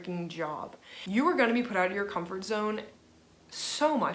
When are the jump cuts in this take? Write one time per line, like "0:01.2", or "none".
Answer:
0:01.0